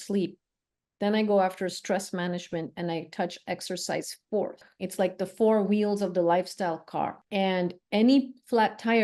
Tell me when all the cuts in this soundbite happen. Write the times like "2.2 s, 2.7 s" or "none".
4.6 s, 7.2 s